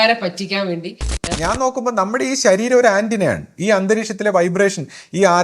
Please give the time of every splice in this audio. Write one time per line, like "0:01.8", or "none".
0:01.2